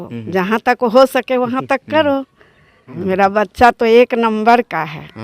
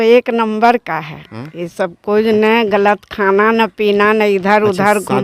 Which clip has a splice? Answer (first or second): first